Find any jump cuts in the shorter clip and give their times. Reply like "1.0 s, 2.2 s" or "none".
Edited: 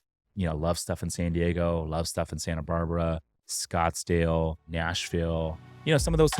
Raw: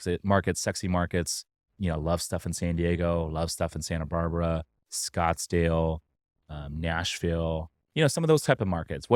4.6 s